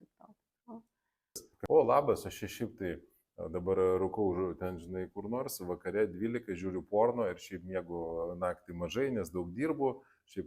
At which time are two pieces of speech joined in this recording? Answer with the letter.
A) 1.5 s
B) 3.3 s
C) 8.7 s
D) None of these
A